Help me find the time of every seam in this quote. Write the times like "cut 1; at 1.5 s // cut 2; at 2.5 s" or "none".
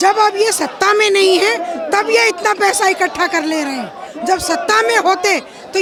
none